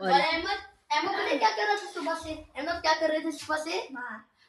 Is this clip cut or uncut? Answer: uncut